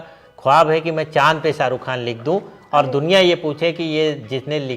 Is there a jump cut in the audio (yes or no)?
no